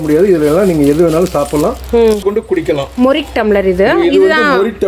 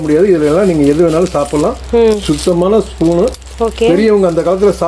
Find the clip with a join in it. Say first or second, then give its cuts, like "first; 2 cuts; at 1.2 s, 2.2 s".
first; 1 cut; at 2.2 s